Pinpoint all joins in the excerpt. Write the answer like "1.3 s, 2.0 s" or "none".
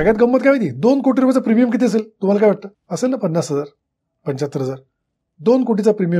2.8 s